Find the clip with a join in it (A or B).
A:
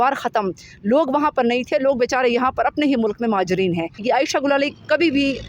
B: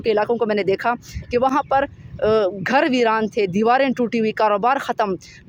A